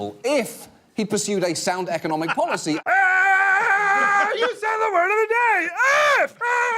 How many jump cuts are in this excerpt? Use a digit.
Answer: 1